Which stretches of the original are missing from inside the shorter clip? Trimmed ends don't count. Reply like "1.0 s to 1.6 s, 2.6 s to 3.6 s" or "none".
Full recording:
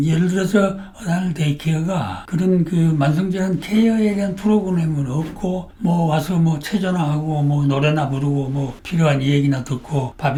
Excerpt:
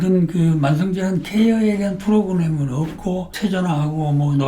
5.7 s to 6.6 s